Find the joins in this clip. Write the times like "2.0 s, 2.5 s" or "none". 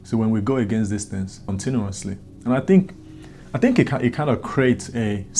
1.5 s